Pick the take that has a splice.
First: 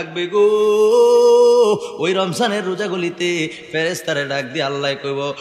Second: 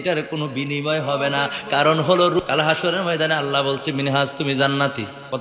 second; 1 cut; at 2.4 s

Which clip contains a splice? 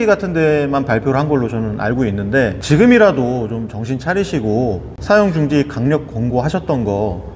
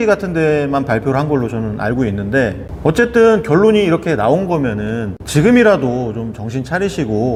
first; 1 cut; at 2.6 s

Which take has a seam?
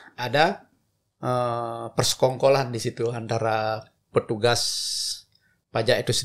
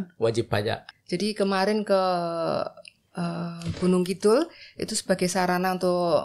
second; 1 cut; at 0.9 s

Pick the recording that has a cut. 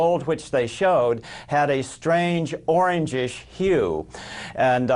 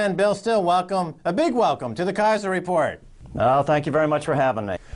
first; 1 cut; at 1.3 s

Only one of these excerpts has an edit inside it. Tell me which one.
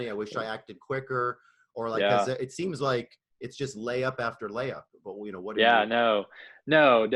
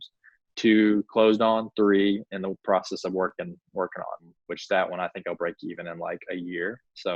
second; 1 cut; at 4.3 s

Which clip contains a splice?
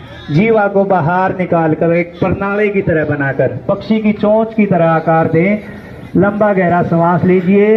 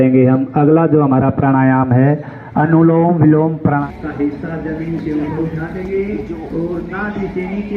second; 1 cut; at 3.8 s

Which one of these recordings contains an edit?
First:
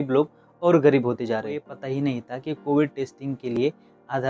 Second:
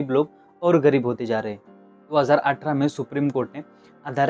first; 1 cut; at 1.8 s

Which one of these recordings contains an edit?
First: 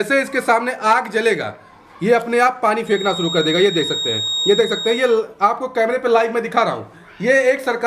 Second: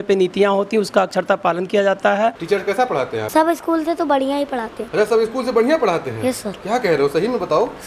second; 3 cuts; at 2.4 s, 3.3 s, 4.8 s

